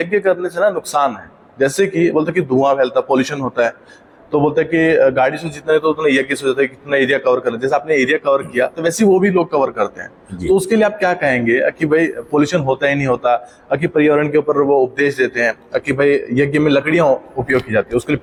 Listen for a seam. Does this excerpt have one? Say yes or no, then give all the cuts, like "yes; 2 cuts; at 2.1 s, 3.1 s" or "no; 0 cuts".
no; 0 cuts